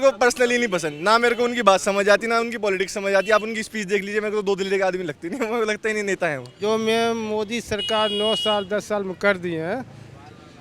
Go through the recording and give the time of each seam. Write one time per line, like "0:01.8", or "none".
0:06.4